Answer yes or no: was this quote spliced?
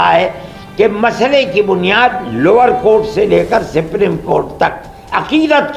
no